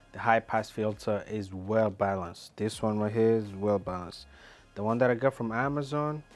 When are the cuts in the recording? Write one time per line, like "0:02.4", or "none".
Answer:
none